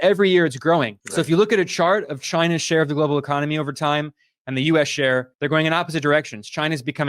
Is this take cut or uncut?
uncut